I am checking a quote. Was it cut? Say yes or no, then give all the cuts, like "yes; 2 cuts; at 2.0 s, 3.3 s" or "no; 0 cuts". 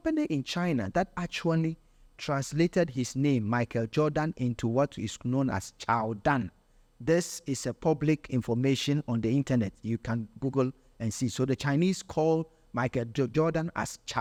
no; 0 cuts